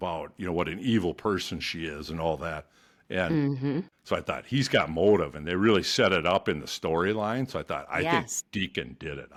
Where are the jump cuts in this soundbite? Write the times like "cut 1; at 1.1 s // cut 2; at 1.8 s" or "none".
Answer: none